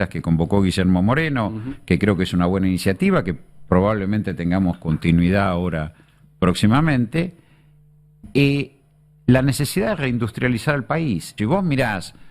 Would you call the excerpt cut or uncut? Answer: cut